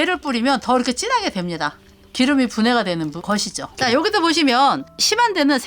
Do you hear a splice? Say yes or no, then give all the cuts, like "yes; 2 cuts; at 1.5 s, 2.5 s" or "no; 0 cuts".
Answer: yes; 1 cut; at 3.6 s